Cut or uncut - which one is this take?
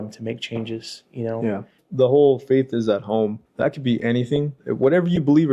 cut